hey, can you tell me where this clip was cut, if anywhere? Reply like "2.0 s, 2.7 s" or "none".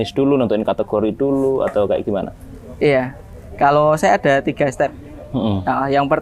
none